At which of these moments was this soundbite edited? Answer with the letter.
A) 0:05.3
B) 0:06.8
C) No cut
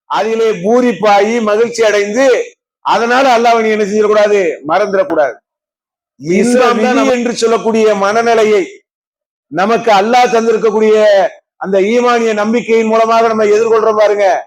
B